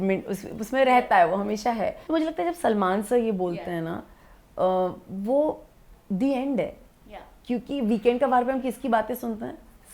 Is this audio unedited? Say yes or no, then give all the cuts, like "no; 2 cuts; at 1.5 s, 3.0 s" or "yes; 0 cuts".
no; 1 cut; at 2.0 s